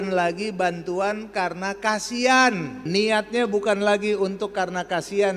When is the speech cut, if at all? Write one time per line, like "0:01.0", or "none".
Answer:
0:02.8